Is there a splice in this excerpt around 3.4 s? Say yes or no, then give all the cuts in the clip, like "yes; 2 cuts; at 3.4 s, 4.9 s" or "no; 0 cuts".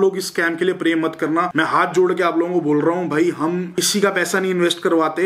no; 0 cuts